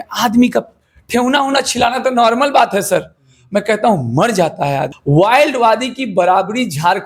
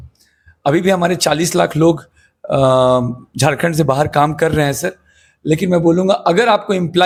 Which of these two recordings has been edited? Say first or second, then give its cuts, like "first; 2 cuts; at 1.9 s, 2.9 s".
first; 1 cut; at 4.9 s